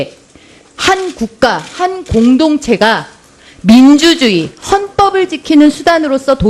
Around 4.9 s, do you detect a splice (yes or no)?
yes